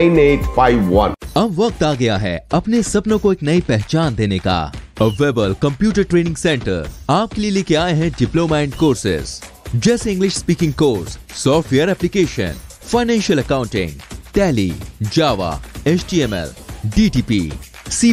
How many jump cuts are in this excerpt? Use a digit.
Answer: 0